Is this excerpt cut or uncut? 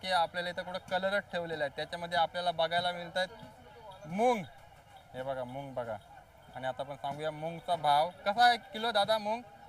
uncut